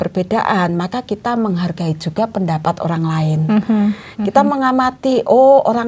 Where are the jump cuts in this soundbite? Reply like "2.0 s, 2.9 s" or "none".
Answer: none